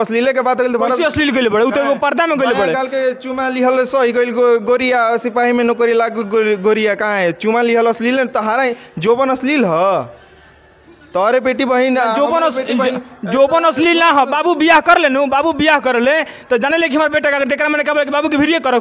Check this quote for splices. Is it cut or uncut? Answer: uncut